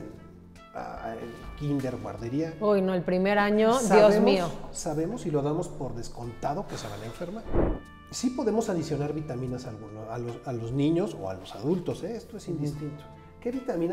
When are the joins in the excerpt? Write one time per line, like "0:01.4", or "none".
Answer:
0:07.5